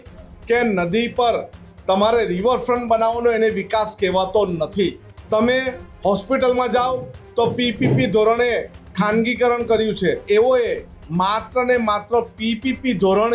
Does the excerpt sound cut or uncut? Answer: cut